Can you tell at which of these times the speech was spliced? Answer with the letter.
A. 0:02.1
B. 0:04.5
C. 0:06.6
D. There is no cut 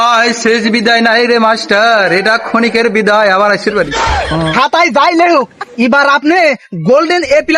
B